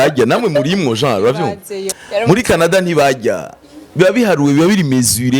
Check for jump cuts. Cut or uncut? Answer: cut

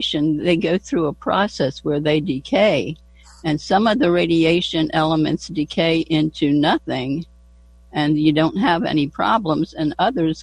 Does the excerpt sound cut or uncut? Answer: uncut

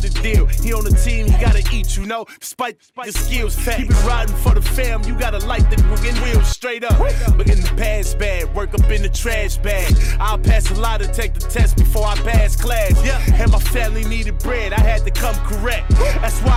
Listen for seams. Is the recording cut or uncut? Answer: uncut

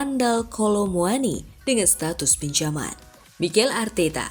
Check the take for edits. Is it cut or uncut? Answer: cut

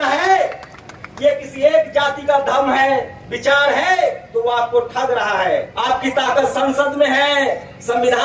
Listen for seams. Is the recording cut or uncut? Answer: cut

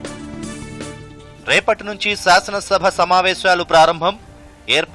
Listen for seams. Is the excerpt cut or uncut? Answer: cut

